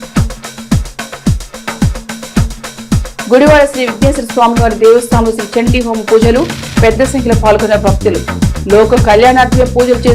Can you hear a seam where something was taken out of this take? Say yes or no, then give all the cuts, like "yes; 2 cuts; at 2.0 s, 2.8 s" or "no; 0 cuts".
yes; 1 cut; at 2.1 s